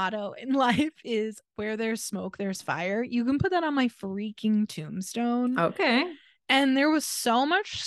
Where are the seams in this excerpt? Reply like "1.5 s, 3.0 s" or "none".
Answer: none